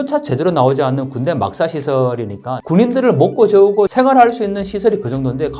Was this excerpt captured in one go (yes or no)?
no